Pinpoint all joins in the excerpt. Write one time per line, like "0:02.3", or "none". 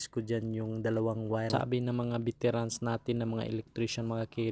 0:01.5